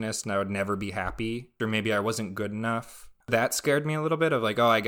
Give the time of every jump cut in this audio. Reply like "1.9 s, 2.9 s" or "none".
1.5 s, 3.3 s